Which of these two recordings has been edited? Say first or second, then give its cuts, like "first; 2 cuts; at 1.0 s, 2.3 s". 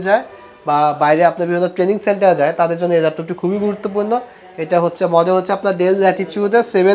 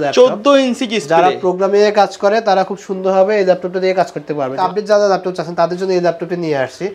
second; 1 cut; at 4.6 s